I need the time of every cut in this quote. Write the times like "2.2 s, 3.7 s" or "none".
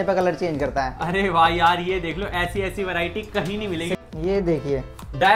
4.0 s